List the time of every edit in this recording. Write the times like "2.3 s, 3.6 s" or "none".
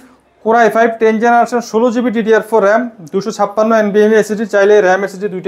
none